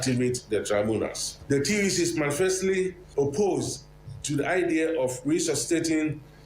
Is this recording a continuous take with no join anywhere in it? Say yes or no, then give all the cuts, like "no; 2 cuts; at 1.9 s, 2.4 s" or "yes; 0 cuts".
no; 2 cuts; at 1.3 s, 3.0 s